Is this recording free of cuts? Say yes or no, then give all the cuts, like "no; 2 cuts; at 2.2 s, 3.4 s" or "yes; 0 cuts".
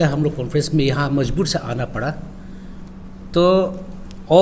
yes; 0 cuts